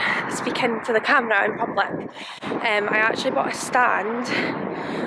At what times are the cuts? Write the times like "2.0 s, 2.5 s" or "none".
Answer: none